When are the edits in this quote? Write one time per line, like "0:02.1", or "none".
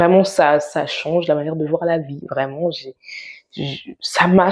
none